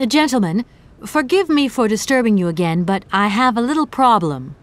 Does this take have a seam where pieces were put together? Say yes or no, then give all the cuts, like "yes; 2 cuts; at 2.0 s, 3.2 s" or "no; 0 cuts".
no; 0 cuts